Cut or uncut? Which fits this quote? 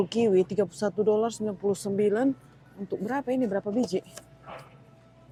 uncut